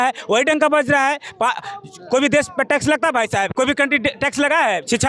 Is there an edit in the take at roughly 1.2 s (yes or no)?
no